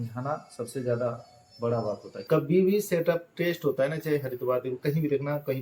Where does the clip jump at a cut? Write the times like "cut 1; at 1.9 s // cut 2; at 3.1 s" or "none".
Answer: cut 1; at 2.2 s